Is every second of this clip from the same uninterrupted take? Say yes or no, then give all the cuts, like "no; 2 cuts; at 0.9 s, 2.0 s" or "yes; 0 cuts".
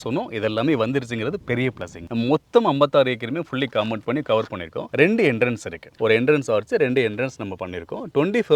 no; 1 cut; at 1.9 s